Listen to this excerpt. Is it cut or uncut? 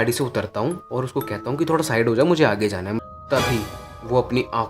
cut